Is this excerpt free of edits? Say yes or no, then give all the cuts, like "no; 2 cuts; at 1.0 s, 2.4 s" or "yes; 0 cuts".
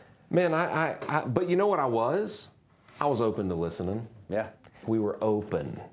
no; 1 cut; at 4.8 s